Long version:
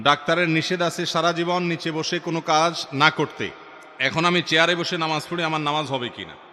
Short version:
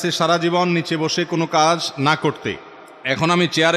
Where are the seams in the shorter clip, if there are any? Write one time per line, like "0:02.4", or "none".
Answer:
none